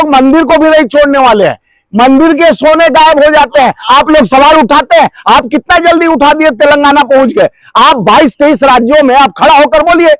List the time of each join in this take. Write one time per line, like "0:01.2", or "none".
none